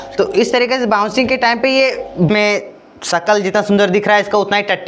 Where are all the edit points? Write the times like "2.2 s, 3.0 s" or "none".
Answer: 2.3 s